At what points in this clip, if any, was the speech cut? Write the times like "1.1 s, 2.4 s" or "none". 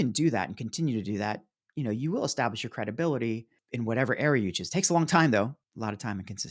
3.6 s, 5.6 s